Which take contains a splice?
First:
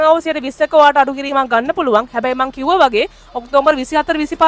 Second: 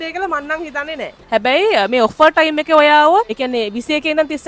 second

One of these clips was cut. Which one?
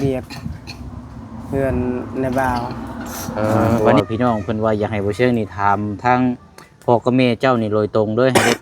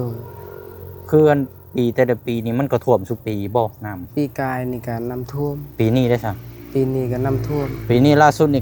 first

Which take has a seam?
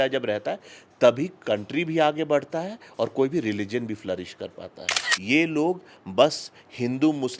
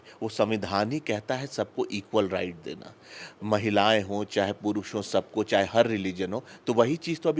first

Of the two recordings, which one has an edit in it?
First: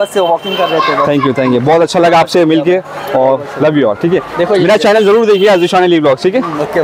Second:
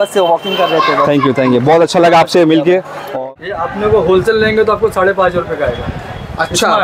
second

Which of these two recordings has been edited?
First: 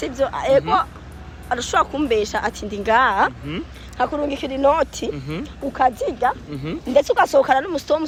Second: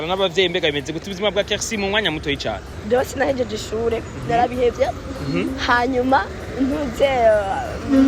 second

